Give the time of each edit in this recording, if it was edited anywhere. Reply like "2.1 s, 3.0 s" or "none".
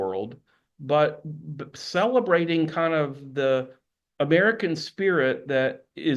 none